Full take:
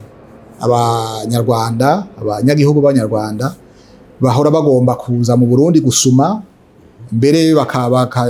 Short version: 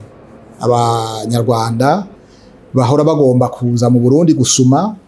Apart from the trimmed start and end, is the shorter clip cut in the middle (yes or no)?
yes